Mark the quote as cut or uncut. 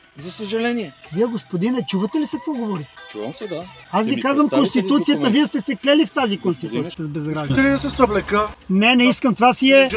cut